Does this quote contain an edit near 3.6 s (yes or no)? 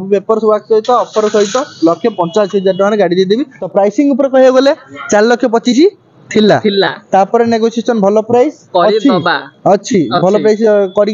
yes